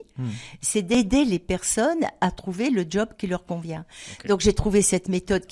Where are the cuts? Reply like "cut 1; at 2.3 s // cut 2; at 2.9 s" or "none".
cut 1; at 0.9 s